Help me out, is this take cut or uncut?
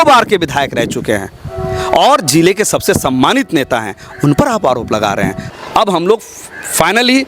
cut